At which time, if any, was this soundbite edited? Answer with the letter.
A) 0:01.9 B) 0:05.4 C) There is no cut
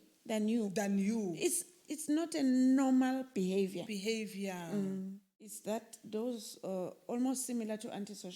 B